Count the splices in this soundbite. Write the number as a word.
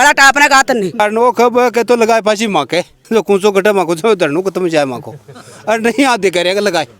one